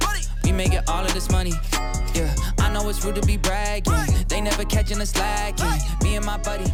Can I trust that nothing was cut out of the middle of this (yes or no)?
yes